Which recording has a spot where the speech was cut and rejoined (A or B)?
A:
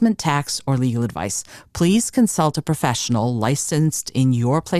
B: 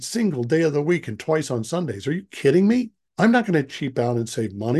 B